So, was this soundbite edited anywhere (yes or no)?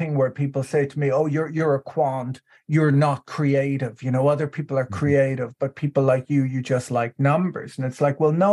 no